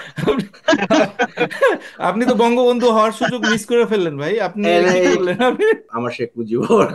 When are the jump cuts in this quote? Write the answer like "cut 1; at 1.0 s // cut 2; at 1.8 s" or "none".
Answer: cut 1; at 5.9 s